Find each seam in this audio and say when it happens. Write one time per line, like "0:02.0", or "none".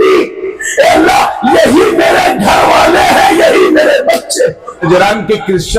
0:04.9